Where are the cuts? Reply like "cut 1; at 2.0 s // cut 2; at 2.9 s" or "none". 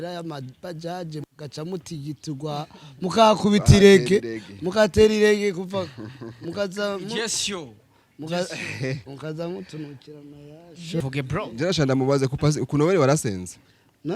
cut 1; at 11.0 s